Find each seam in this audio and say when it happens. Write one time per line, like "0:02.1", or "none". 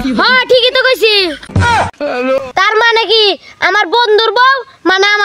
0:02.5